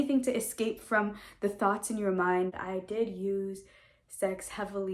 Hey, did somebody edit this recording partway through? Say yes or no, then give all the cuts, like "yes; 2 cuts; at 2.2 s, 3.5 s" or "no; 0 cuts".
yes; 1 cut; at 2.5 s